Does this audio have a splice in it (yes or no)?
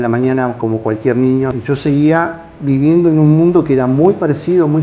yes